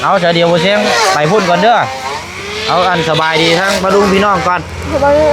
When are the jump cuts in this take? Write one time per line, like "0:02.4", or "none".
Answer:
none